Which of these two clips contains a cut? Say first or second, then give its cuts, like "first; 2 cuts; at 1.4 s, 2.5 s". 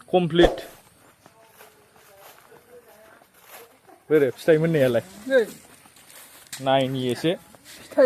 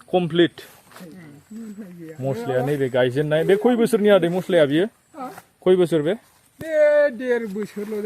second; 1 cut; at 0.9 s